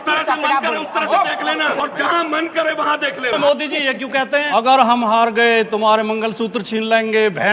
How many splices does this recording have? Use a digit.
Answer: 3